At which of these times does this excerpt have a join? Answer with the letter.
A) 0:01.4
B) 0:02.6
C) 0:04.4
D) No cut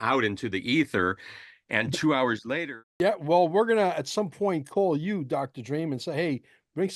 B